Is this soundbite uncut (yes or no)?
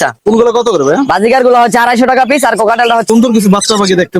no